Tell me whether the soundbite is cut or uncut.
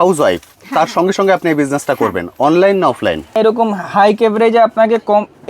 cut